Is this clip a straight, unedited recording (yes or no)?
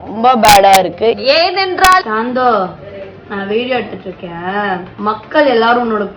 no